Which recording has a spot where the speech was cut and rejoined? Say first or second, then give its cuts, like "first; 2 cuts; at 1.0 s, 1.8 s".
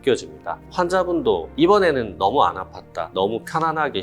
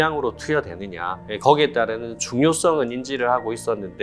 first; 2 cuts; at 1.6 s, 3.1 s